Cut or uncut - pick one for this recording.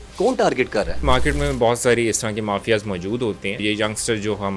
cut